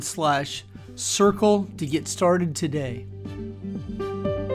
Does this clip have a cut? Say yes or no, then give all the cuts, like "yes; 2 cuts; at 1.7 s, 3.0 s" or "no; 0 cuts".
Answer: yes; 1 cut; at 3.0 s